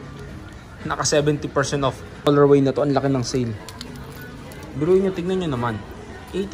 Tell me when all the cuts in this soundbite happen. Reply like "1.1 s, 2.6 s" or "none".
2.3 s